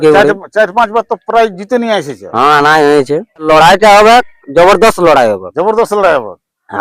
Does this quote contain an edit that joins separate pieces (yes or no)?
yes